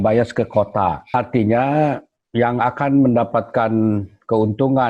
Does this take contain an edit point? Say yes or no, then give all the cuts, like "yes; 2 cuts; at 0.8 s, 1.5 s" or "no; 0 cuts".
yes; 1 cut; at 1.1 s